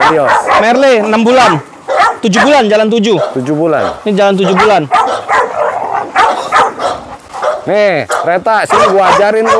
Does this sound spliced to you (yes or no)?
no